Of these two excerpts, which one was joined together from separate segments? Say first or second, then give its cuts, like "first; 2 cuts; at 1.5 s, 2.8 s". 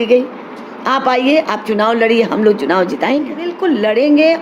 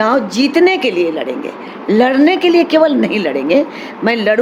first; 1 cut; at 3.5 s